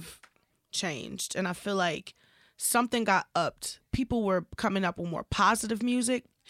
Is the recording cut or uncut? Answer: cut